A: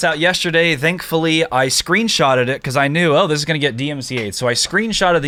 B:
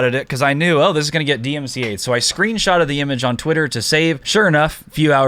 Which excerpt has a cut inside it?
B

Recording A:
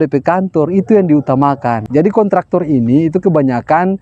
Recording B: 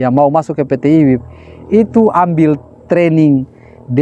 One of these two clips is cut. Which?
A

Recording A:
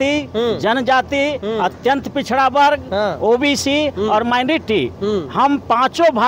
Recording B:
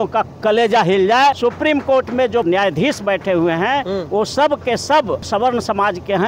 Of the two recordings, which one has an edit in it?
B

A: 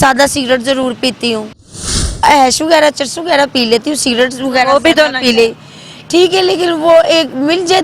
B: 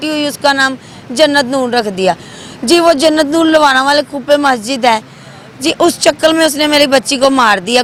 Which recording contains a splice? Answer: A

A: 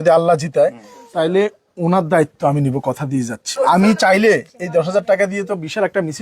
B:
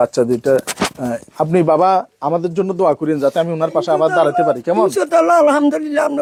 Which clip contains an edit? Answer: A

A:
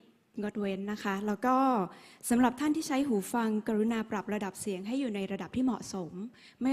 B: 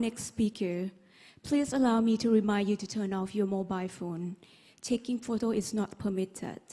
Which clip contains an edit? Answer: A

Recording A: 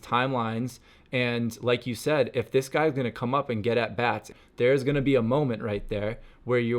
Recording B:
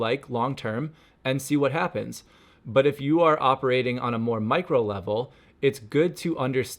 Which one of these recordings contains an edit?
A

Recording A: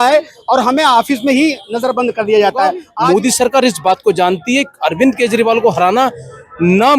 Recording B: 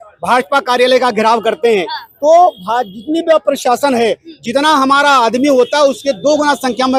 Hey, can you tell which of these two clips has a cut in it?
A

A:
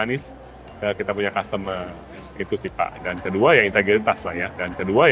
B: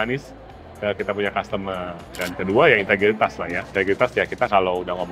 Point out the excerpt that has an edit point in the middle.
B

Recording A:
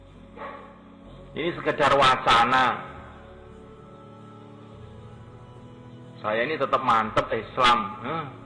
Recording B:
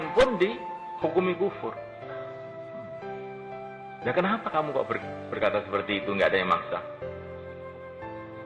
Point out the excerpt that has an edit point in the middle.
A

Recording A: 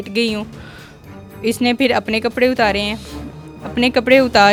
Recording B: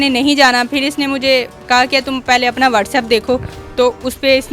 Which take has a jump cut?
B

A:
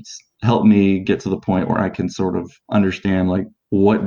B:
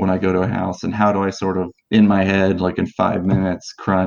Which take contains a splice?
A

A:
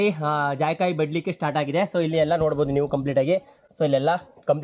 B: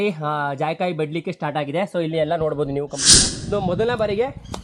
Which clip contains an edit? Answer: B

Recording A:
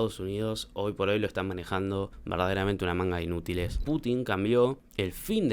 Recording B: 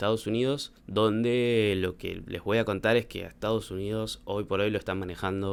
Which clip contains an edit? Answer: A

